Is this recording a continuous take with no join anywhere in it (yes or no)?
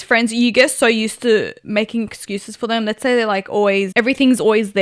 no